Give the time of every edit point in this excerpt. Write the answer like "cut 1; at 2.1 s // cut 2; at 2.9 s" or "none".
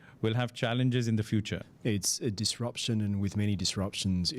cut 1; at 1.6 s